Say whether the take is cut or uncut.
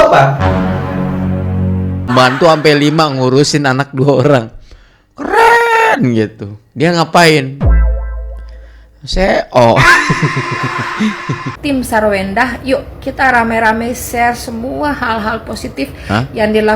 cut